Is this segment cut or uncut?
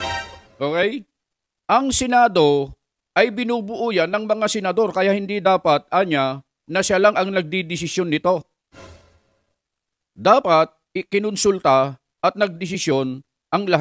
uncut